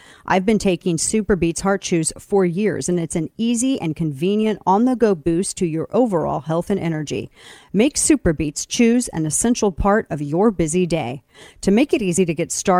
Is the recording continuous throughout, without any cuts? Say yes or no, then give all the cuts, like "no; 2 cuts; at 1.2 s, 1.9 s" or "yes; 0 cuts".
yes; 0 cuts